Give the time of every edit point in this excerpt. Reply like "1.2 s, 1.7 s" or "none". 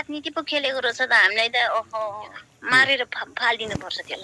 2.3 s